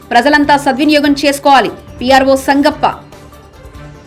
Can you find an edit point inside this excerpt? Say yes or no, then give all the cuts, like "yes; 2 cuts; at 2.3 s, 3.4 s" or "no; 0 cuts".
no; 0 cuts